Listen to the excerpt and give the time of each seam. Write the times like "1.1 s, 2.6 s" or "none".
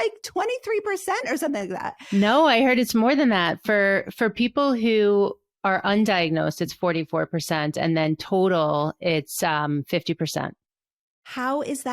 1.9 s